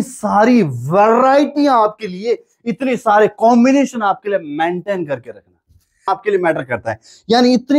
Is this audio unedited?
no; 1 cut; at 6.1 s

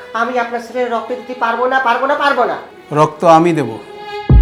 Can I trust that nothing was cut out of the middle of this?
yes; 0 cuts

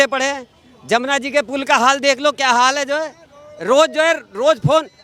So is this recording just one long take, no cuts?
yes; 0 cuts

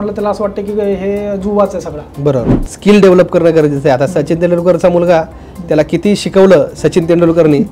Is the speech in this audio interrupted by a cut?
yes; 1 cut; at 2.6 s

